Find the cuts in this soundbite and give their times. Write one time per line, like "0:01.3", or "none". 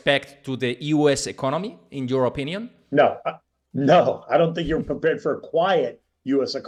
none